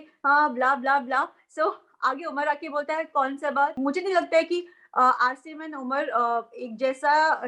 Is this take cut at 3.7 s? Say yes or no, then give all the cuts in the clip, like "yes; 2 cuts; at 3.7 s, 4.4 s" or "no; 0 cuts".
yes; 1 cut; at 3.7 s